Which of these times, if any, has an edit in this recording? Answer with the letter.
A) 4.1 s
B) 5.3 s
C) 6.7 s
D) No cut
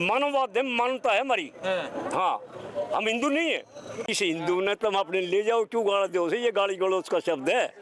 A